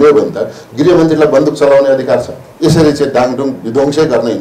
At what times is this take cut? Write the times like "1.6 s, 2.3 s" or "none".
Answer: 2.4 s